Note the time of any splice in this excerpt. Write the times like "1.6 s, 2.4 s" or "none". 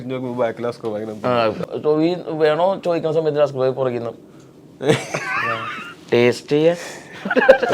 1.6 s